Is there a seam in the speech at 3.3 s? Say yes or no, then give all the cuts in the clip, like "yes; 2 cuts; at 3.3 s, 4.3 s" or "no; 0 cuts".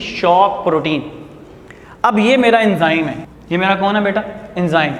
yes; 1 cut; at 3.3 s